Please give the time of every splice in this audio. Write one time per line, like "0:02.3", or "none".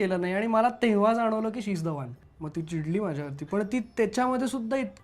0:02.3